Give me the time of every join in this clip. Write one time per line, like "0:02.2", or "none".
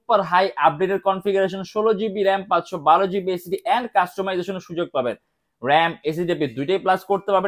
none

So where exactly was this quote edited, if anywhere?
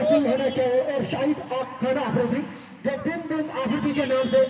none

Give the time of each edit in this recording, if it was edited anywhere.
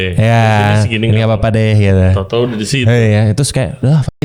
none

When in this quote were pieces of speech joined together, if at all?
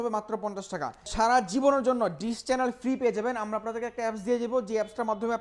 0:01.1

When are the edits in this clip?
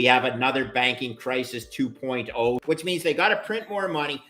0:02.6

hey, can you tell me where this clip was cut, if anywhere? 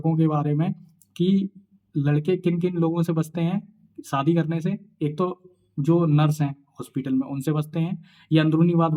none

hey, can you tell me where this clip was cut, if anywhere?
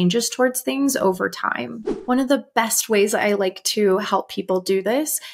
0:01.8

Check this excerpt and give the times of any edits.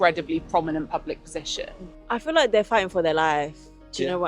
0:01.9

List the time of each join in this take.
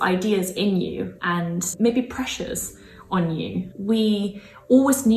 0:01.1
0:03.7

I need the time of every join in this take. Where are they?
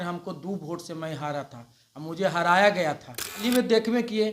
0:03.4

